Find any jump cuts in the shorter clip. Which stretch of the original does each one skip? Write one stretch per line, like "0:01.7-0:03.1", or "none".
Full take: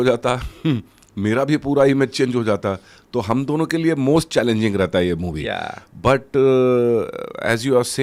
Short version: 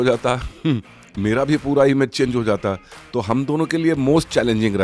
none